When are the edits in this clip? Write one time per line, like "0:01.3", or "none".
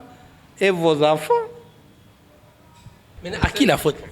0:03.2